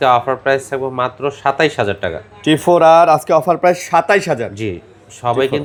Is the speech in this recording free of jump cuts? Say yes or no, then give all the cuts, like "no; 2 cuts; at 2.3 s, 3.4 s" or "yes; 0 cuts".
yes; 0 cuts